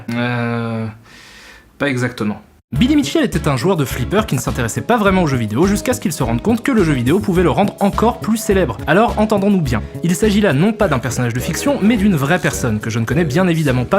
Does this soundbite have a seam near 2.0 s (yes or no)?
no